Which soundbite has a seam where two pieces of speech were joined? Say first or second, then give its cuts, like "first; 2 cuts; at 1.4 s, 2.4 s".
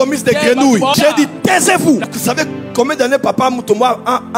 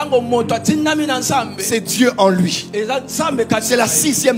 first; 2 cuts; at 0.9 s, 2.1 s